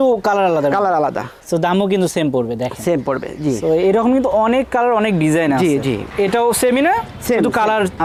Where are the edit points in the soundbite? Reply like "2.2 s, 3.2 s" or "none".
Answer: none